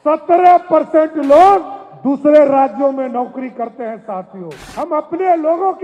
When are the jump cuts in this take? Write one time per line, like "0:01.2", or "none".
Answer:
0:04.6